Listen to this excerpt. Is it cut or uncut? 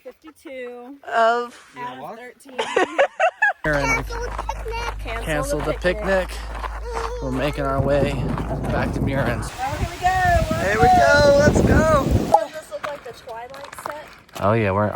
cut